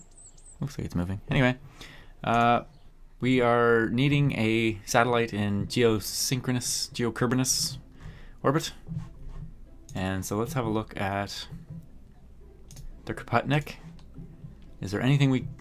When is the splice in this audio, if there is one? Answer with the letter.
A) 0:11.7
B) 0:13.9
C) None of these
B